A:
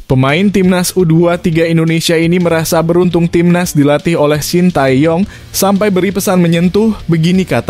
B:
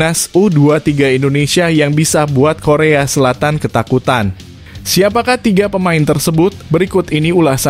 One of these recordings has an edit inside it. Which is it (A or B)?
A